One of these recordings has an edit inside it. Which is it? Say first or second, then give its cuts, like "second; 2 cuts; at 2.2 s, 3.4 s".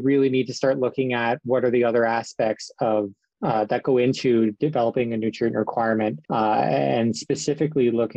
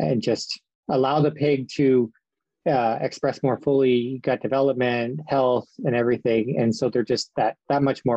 first; 2 cuts; at 3.2 s, 6.2 s